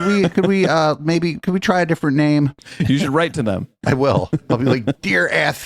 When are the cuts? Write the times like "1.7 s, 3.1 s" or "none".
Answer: 2.7 s